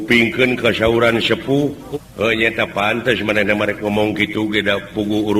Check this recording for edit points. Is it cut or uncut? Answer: cut